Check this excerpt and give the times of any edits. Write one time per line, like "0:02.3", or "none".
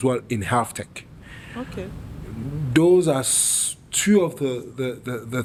none